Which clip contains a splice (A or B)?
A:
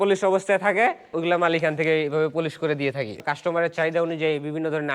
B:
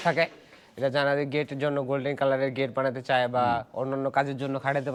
A